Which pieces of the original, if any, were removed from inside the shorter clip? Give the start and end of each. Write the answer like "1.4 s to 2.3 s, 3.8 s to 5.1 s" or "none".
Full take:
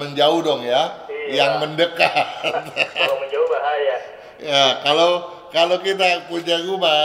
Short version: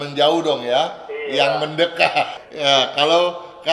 2.4 s to 4.3 s